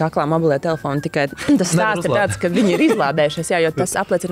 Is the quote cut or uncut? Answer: uncut